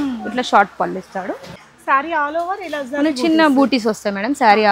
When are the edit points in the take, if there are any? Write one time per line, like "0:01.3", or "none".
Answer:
0:01.5